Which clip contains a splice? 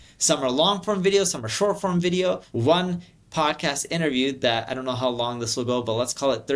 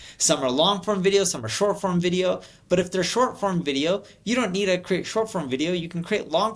first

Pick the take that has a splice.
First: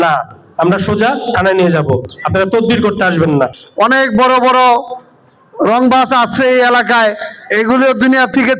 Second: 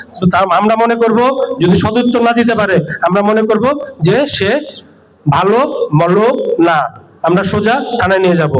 first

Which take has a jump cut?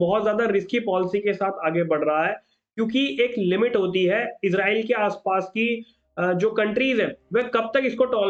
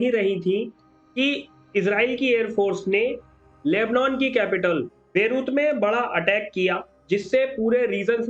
second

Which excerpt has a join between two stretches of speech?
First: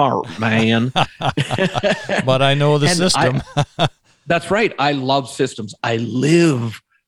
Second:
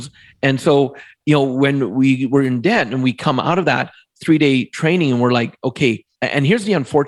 second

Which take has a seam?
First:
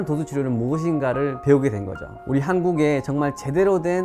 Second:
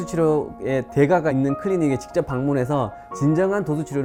first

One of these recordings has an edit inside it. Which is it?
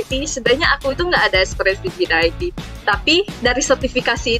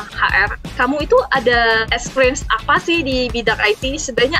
second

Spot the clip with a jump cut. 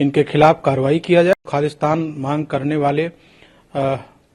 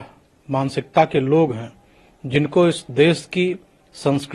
first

